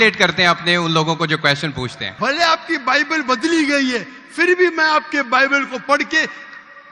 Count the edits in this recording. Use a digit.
1